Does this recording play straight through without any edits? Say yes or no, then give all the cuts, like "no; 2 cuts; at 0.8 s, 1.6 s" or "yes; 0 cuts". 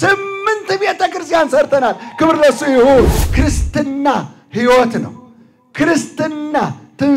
no; 1 cut; at 3.2 s